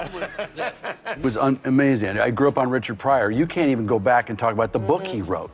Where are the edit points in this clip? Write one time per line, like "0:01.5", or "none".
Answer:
0:01.1